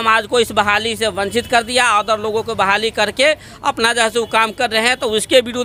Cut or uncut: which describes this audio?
uncut